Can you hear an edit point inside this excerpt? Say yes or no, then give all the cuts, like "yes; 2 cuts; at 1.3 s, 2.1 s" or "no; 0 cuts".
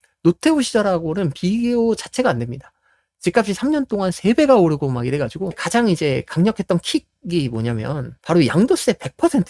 yes; 2 cuts; at 5.6 s, 8.1 s